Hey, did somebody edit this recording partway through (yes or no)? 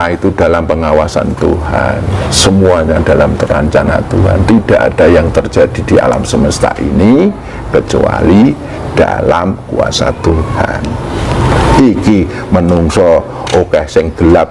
no